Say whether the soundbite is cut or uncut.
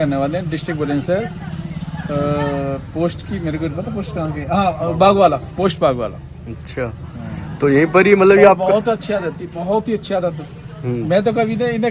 uncut